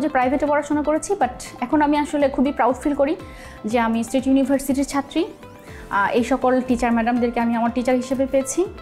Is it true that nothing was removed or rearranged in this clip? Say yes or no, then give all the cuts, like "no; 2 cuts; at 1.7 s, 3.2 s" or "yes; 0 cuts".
yes; 0 cuts